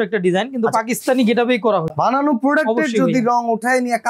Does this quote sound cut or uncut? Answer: cut